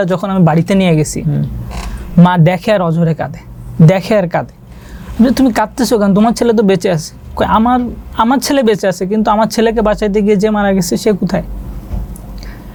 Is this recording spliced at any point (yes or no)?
no